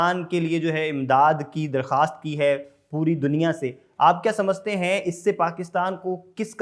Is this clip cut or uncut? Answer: uncut